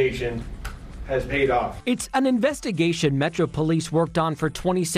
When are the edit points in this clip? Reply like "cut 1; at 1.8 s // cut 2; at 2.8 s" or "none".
none